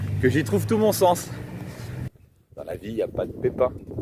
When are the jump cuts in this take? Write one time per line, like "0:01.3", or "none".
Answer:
0:01.9

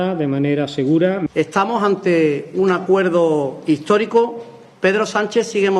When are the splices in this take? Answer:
0:01.2

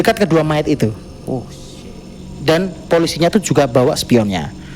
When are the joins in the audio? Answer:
0:02.2

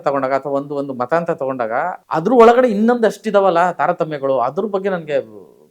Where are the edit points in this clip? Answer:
0:02.0

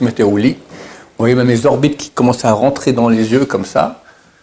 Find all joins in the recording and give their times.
none

